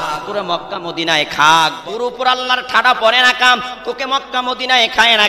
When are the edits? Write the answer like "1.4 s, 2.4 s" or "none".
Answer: 1.8 s

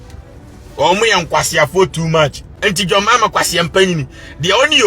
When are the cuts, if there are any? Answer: 2.5 s

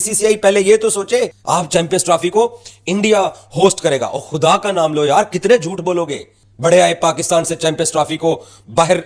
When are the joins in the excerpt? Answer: 1.4 s

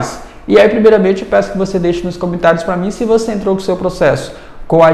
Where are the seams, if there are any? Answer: none

